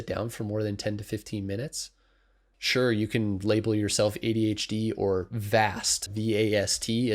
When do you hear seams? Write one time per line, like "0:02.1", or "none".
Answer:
0:02.6
0:06.1